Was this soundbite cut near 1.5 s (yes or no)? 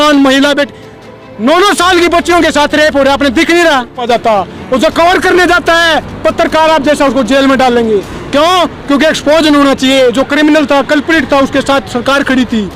no